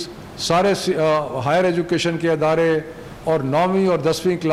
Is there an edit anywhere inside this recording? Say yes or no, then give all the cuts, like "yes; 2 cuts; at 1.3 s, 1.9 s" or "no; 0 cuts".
no; 0 cuts